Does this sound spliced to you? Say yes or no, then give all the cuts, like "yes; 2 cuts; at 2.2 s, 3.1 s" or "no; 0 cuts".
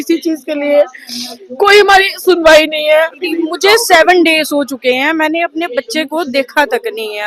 yes; 1 cut; at 3.1 s